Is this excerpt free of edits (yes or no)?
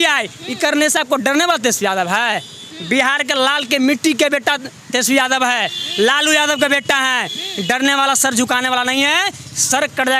yes